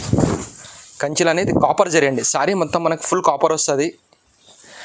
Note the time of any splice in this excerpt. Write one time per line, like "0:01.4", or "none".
none